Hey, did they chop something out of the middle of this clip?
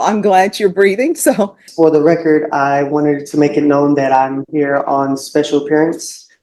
yes; 1 cut; at 1.6 s

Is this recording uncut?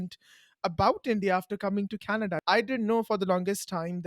no; 1 cut; at 2.4 s

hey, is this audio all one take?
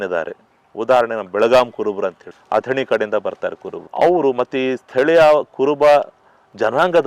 yes; 0 cuts

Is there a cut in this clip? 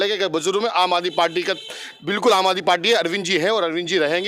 no; 0 cuts

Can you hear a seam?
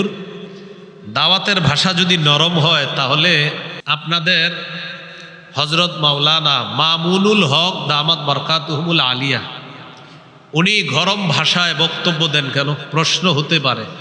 yes; 1 cut; at 3.8 s

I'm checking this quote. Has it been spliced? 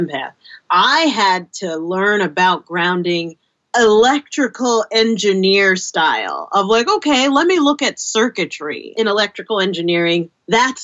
yes; 2 cuts; at 3.6 s, 8.9 s

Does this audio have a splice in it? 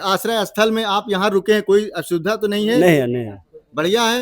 no; 0 cuts

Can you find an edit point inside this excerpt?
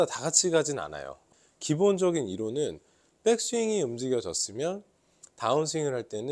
yes; 1 cut; at 1.3 s

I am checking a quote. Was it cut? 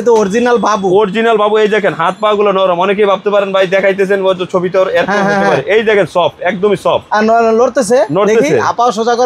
no; 0 cuts

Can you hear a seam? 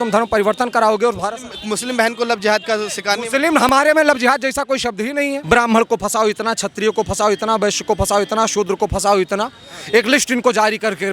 yes; 1 cut; at 5.4 s

